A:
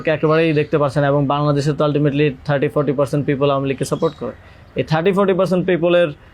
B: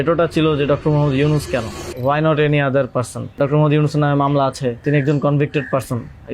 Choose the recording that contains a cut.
B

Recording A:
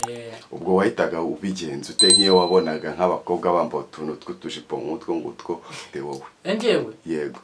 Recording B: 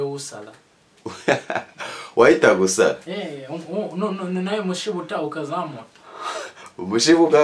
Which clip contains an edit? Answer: A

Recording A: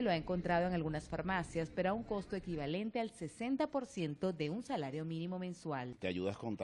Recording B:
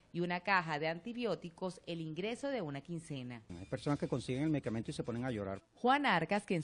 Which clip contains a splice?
A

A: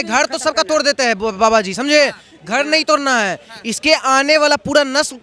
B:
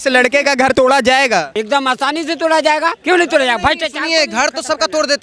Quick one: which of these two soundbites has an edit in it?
B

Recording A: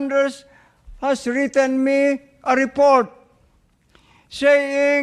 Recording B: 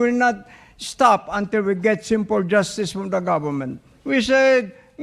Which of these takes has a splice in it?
B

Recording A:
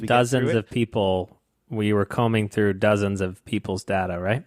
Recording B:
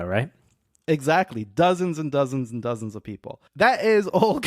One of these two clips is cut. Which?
B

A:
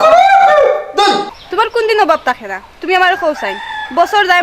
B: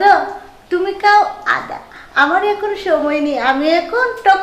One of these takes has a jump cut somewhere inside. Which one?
A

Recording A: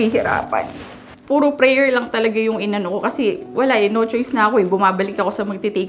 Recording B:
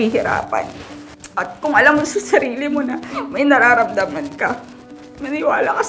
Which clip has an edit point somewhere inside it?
B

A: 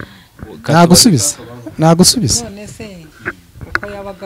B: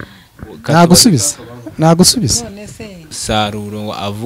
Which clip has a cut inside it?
B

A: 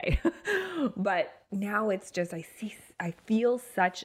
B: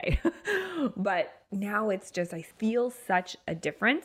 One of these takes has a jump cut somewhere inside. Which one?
B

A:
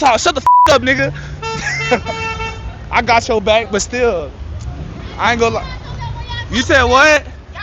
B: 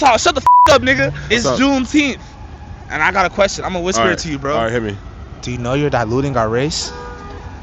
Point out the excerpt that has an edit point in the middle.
B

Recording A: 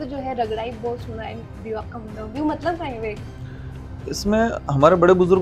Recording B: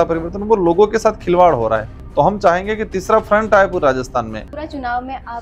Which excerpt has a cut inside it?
B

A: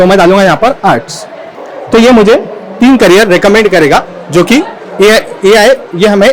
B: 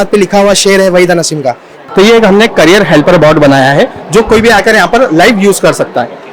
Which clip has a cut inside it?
B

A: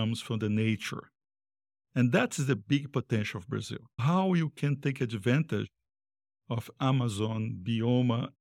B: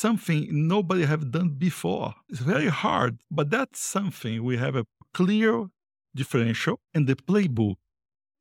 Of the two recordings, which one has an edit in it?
B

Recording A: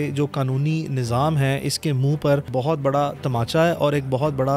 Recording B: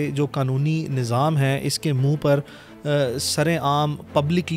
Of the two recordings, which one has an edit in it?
A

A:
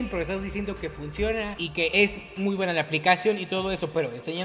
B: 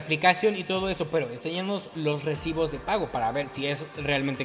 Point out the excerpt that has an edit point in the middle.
A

